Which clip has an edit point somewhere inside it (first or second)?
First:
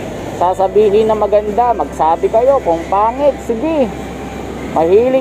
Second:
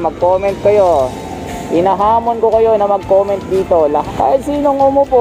second